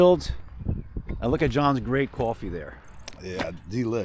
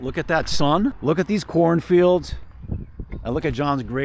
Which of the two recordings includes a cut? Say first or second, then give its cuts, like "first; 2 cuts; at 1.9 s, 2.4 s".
second; 1 cut; at 1.0 s